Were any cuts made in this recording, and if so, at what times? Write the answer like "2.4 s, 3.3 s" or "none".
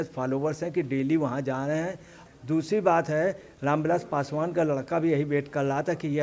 2.1 s